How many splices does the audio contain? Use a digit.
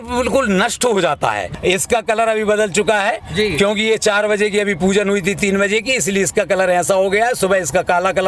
1